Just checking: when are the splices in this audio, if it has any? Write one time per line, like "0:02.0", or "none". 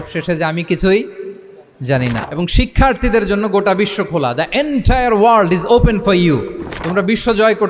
0:02.2